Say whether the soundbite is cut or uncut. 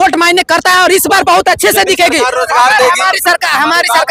uncut